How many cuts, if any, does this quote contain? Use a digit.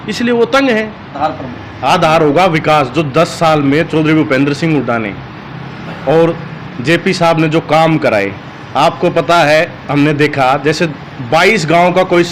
1